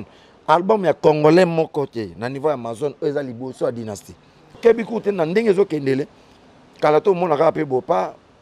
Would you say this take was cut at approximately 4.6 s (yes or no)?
yes